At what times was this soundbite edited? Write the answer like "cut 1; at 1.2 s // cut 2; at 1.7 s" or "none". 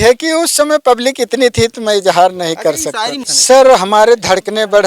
cut 1; at 3.2 s